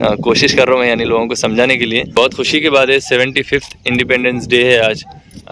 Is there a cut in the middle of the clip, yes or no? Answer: yes